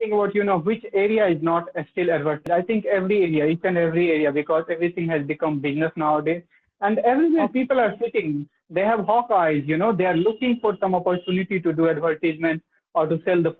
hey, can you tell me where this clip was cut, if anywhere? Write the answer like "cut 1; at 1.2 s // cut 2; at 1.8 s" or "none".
cut 1; at 2.5 s